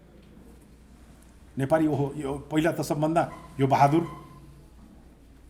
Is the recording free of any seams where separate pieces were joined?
yes; 0 cuts

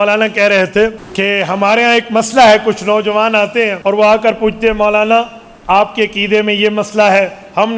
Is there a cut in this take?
yes; 2 cuts; at 1.0 s, 3.8 s

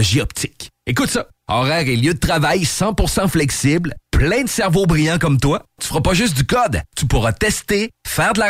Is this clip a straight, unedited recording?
yes; 0 cuts

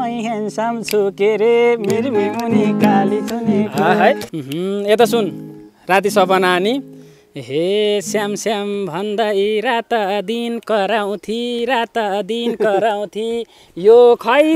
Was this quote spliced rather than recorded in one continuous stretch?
yes; 1 cut; at 4.3 s

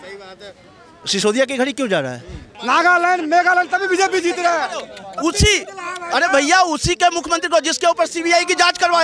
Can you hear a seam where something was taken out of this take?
yes; 1 cut; at 2.5 s

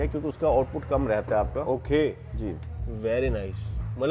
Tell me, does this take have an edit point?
no; 0 cuts

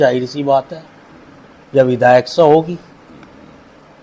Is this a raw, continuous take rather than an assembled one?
yes; 0 cuts

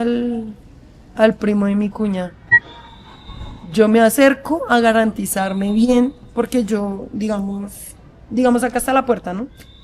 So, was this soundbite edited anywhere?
no; 0 cuts

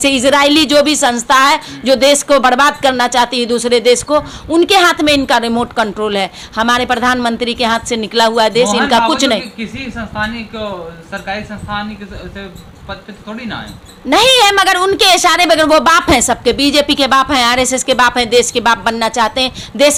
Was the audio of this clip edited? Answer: no; 0 cuts

